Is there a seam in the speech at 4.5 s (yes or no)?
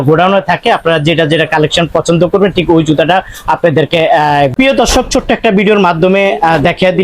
yes